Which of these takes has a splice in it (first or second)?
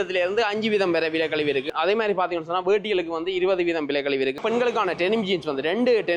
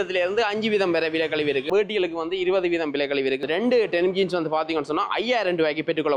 second